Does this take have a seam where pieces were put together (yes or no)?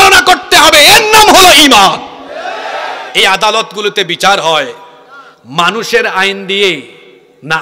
yes